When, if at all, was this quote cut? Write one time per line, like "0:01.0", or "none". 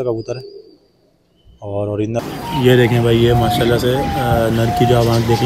0:02.2